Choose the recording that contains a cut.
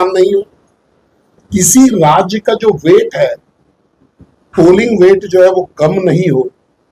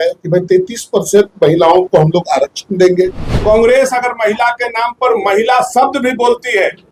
second; 1 cut; at 3.3 s

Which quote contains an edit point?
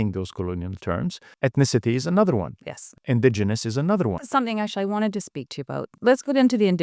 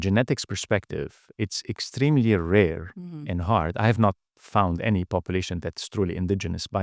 first; 4 cuts; at 1.3 s, 3.0 s, 4.2 s, 5.9 s

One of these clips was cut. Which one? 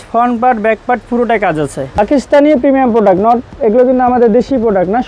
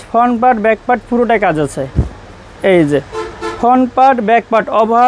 first; 1 cut; at 1.9 s

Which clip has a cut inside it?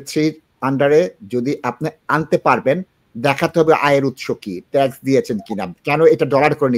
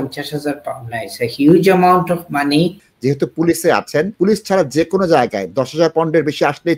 second; 2 cuts; at 2.9 s, 4.1 s

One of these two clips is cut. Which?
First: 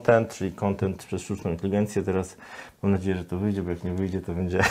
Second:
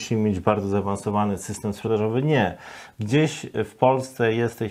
second; 1 cut; at 1.8 s

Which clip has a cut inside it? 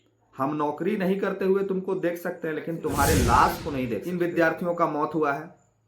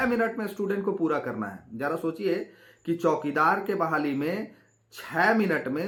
first; 1 cut; at 4.0 s

